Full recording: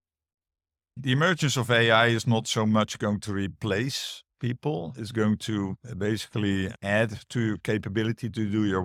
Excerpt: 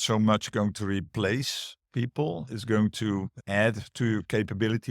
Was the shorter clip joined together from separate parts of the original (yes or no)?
yes